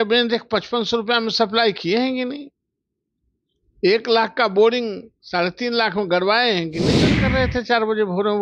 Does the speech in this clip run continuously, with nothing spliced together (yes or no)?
no